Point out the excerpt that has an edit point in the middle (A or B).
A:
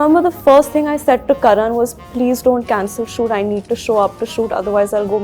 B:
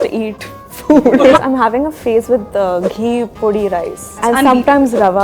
B